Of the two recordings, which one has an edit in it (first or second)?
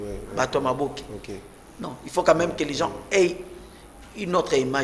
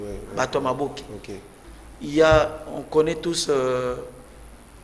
second